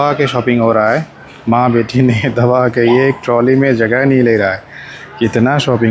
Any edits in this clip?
no; 0 cuts

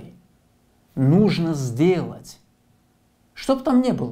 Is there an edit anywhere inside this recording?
no; 0 cuts

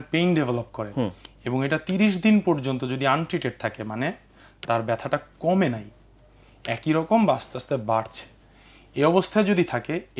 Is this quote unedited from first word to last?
yes; 0 cuts

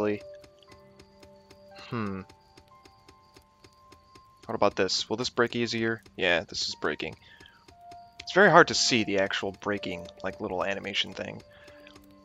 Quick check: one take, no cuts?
yes; 0 cuts

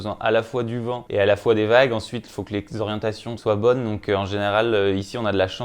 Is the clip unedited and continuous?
no; 2 cuts; at 1.0 s, 3.3 s

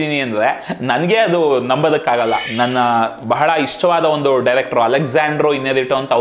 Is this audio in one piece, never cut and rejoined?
no; 1 cut; at 2.4 s

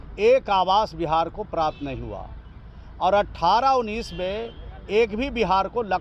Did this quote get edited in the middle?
no; 0 cuts

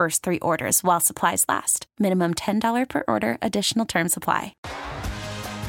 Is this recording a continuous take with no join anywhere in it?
no; 1 cut; at 4.5 s

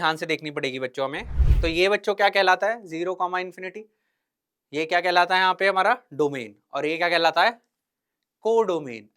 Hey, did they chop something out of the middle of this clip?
yes; 1 cut; at 1.3 s

